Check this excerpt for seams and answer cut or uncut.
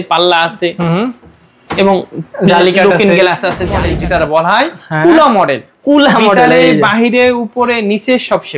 cut